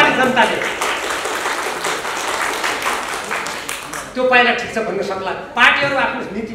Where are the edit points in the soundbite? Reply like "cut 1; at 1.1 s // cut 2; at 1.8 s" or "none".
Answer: cut 1; at 5.4 s